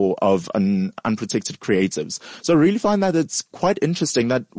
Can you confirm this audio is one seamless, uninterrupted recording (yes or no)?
yes